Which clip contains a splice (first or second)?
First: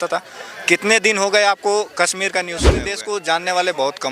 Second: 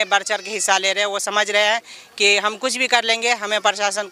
first